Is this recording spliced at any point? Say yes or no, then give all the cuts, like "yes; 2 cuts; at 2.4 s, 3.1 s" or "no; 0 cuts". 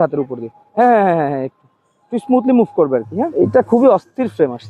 yes; 1 cut; at 3.3 s